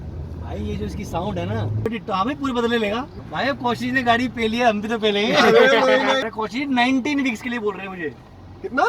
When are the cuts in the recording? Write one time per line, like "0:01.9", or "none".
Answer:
0:01.9
0:03.2
0:06.2